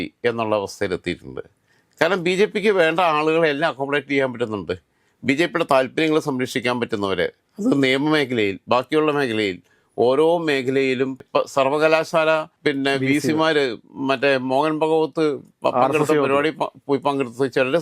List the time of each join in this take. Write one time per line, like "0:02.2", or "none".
none